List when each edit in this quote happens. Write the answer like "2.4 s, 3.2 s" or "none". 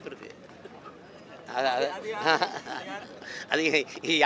none